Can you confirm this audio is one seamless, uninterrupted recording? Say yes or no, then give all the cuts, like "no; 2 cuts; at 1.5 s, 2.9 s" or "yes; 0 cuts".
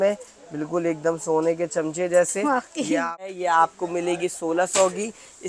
no; 1 cut; at 3.2 s